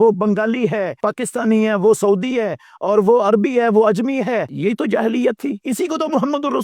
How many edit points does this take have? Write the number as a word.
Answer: three